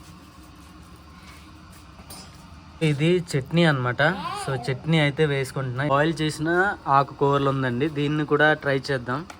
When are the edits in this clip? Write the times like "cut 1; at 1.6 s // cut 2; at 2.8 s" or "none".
cut 1; at 2.8 s // cut 2; at 5.8 s